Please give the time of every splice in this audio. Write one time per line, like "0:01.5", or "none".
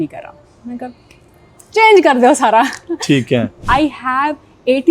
0:03.6